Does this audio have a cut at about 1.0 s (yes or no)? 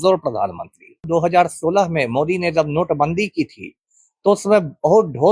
yes